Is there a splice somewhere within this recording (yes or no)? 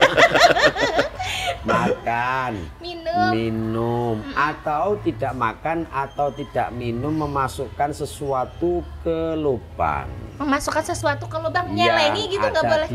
no